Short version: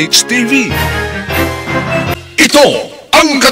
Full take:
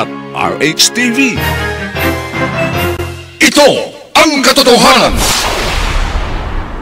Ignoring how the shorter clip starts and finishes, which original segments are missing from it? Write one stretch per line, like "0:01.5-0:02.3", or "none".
0:02.8-0:03.2